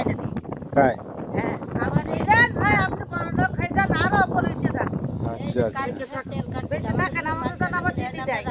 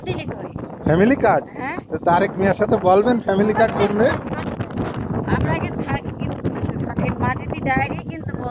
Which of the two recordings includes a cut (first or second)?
second